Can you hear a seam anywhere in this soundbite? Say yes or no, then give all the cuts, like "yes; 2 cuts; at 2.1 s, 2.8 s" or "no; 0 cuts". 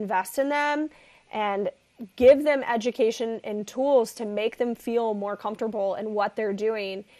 no; 0 cuts